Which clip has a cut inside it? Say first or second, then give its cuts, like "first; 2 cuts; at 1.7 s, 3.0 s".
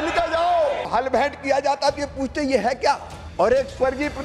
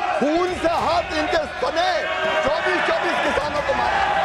first; 2 cuts; at 0.9 s, 3.2 s